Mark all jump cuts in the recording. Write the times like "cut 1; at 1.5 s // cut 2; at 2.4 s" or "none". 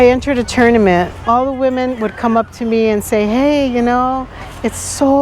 cut 1; at 1.2 s